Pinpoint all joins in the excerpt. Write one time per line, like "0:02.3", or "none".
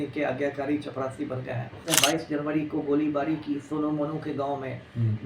0:01.8